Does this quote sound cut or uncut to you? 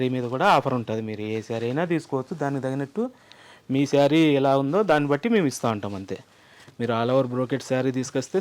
uncut